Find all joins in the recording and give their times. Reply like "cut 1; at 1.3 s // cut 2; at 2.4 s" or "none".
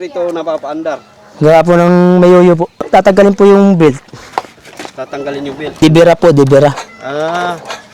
cut 1; at 2.9 s // cut 2; at 5.8 s